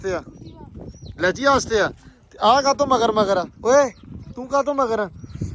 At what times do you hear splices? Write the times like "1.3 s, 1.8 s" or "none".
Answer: none